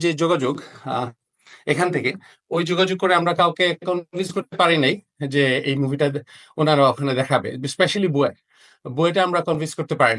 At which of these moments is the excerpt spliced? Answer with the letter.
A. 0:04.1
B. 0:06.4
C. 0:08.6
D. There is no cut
D